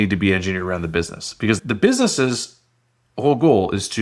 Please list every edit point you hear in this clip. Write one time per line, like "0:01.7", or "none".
0:01.6

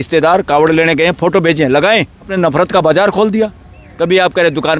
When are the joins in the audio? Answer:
0:02.3

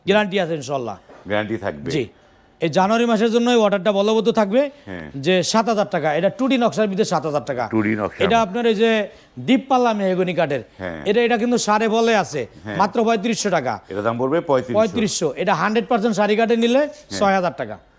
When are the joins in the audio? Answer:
none

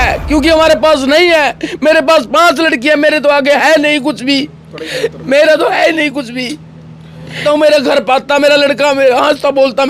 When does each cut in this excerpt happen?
0:07.4

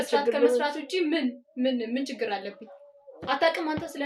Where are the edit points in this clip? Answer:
none

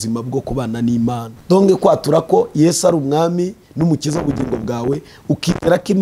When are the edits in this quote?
0:01.3

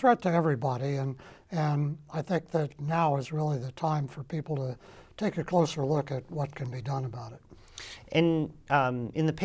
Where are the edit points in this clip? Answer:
0:05.1

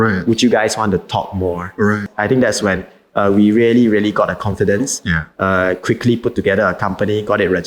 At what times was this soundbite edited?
0:02.1

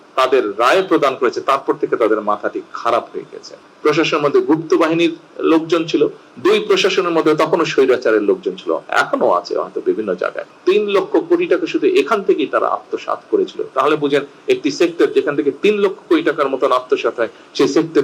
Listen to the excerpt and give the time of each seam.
0:03.6
0:10.4

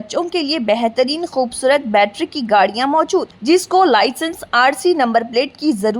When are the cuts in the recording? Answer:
none

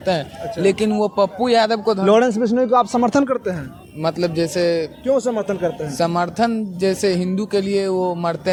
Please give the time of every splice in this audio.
none

